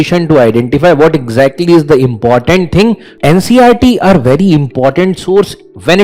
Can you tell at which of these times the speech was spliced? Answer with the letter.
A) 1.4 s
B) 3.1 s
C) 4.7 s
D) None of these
B